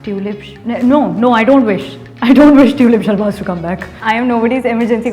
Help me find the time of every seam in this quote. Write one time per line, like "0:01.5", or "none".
0:03.9